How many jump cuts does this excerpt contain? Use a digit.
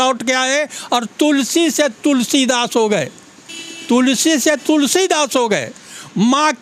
0